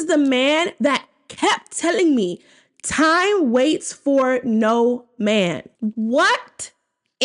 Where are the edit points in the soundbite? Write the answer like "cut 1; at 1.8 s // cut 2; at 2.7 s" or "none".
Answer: cut 1; at 5.7 s

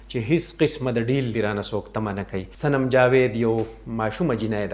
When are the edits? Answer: cut 1; at 2.4 s

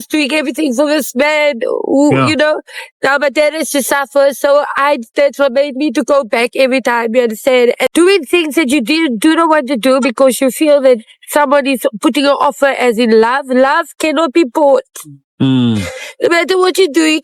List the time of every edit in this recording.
cut 1; at 7.8 s

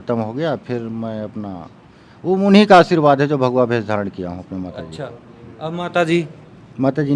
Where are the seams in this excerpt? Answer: none

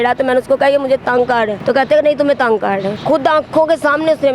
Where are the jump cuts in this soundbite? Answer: cut 1; at 1.6 s // cut 2; at 3.0 s

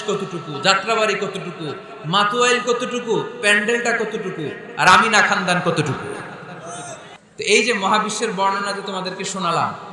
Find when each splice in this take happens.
cut 1; at 7.2 s

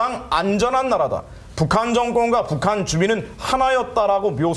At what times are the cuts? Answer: cut 1; at 2.8 s

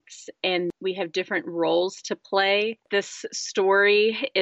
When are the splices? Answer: cut 1; at 0.7 s // cut 2; at 2.8 s

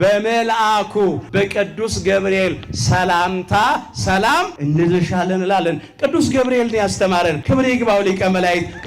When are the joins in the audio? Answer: cut 1; at 1.2 s // cut 2; at 4.5 s // cut 3; at 7.4 s

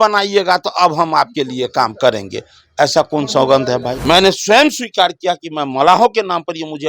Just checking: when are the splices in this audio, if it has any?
cut 1; at 3.9 s

